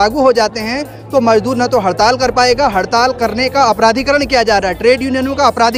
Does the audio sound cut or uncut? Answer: uncut